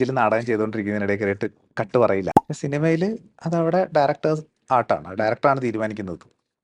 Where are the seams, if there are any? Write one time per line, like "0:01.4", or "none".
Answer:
0:02.4